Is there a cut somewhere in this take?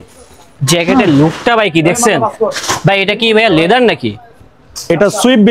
no; 0 cuts

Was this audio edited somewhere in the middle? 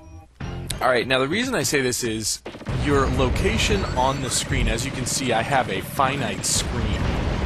yes; 1 cut; at 2.3 s

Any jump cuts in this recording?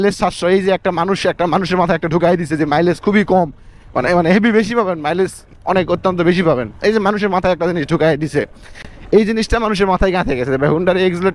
no; 0 cuts

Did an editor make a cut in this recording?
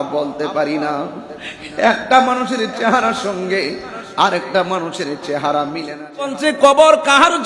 yes; 1 cut; at 6.3 s

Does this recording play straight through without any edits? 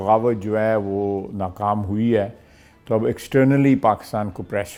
yes; 0 cuts

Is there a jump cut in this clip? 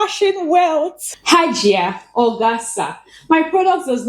yes; 1 cut; at 1.0 s

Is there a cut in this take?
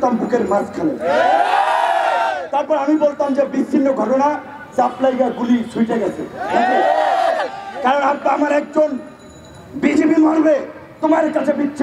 no; 0 cuts

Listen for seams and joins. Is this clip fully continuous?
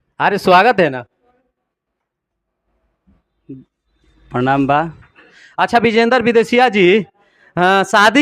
no; 1 cut; at 5.4 s

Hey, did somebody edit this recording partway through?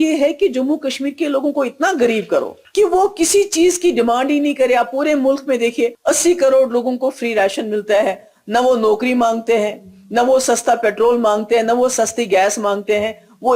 yes; 2 cuts; at 2.6 s, 6.0 s

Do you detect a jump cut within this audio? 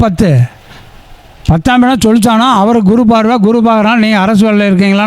no; 0 cuts

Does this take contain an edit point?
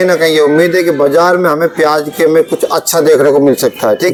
no; 0 cuts

